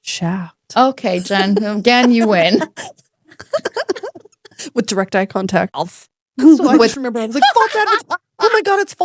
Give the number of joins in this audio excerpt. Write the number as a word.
one